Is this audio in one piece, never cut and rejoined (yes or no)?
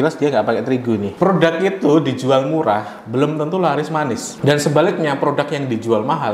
no